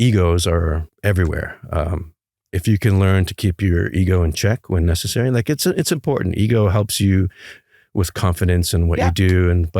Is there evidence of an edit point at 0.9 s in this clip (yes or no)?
yes